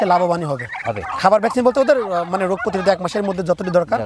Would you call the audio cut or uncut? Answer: cut